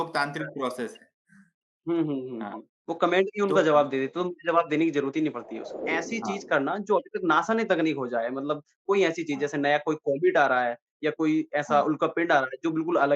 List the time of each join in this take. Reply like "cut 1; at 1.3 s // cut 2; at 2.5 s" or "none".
cut 1; at 5.8 s